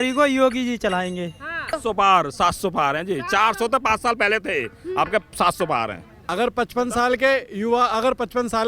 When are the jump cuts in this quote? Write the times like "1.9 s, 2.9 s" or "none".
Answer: 1.7 s, 6.2 s